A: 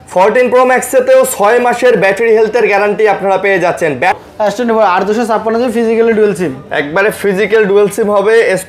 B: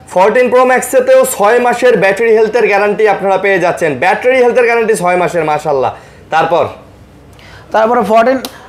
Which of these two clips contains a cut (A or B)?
A